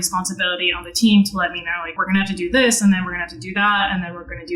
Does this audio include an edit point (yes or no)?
yes